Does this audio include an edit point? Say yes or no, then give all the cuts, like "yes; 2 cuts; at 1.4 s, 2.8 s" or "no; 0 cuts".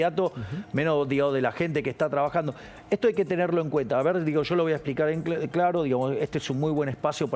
no; 0 cuts